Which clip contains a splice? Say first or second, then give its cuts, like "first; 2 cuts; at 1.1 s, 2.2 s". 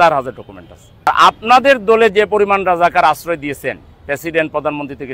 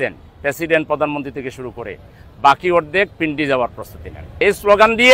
first; 1 cut; at 1.1 s